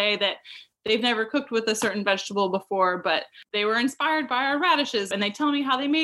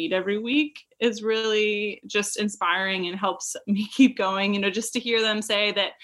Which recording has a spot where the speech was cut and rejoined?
first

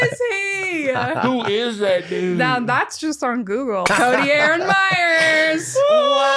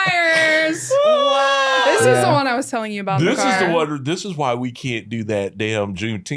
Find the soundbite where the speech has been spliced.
first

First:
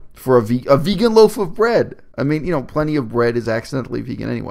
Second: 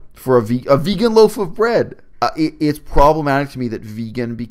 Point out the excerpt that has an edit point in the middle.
second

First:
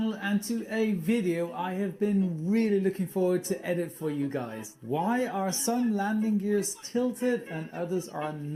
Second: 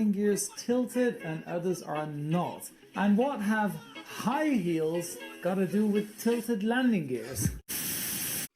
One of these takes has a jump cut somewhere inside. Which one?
second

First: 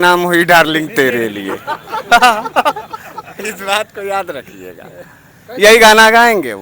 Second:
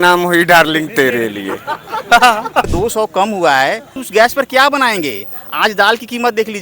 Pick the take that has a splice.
second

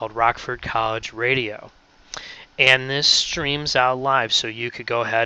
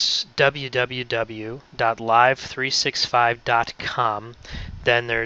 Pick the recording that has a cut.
second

